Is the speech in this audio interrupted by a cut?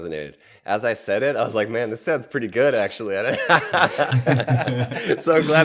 no; 0 cuts

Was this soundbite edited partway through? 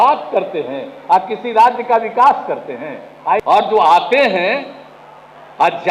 yes; 1 cut; at 3.4 s

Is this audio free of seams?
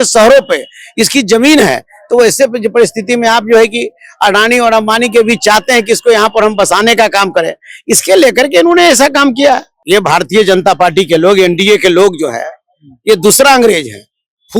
no; 1 cut; at 9.7 s

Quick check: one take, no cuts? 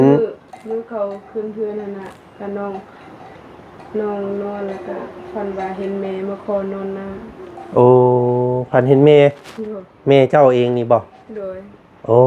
yes; 0 cuts

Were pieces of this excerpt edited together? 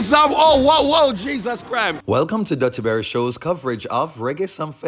yes; 1 cut; at 2.0 s

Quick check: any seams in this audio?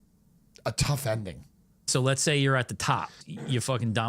yes; 2 cuts; at 1.9 s, 3.2 s

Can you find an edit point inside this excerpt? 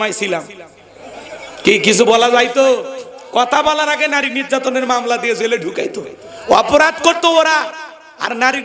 no; 0 cuts

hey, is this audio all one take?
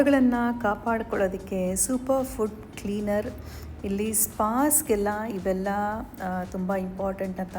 yes; 0 cuts

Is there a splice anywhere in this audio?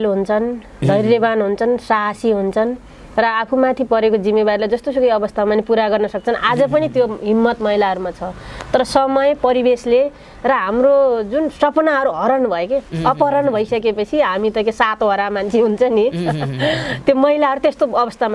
no; 0 cuts

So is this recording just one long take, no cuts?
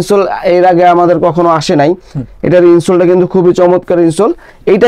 yes; 0 cuts

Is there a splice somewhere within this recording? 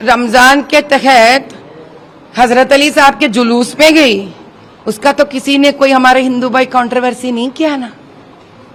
no; 0 cuts

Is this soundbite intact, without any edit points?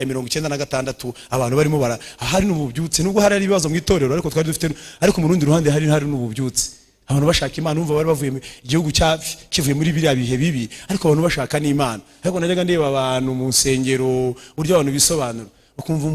yes; 0 cuts

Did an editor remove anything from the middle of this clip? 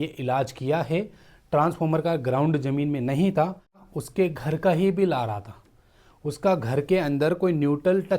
yes; 1 cut; at 3.8 s

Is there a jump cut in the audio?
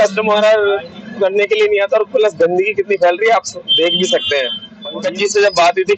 yes; 1 cut; at 5.0 s

